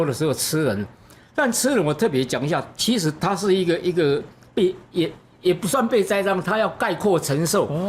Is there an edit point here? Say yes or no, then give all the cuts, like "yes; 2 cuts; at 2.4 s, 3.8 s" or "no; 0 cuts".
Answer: no; 0 cuts